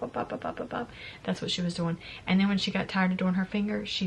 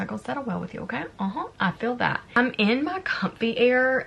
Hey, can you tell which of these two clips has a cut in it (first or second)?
second